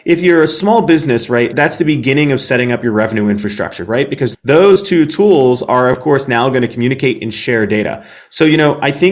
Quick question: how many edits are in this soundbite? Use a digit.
2